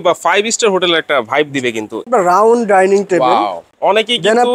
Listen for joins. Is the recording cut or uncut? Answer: cut